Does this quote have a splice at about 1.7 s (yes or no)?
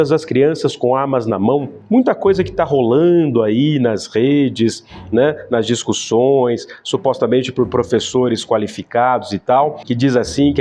yes